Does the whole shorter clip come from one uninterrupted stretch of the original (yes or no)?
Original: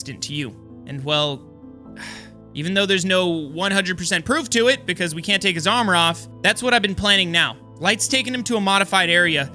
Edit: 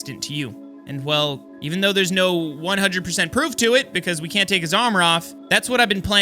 no